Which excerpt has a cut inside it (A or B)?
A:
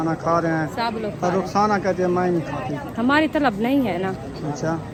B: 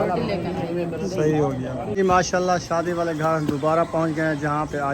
B